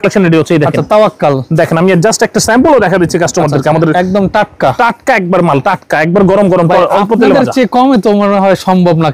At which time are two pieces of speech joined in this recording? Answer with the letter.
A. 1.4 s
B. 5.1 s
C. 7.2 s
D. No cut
D